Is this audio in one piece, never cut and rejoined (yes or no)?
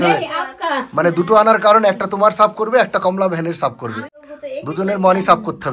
no